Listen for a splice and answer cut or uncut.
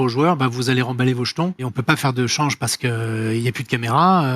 cut